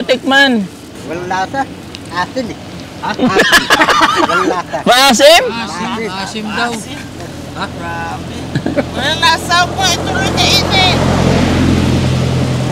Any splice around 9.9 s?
no; 1 cut; at 1.0 s

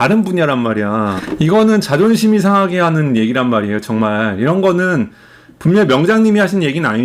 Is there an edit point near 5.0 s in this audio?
no; 1 cut; at 1.2 s

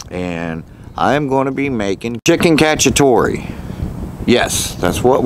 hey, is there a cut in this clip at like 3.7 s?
no; 1 cut; at 2.2 s

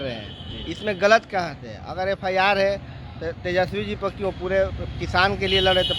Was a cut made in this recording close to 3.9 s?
no; 0 cuts

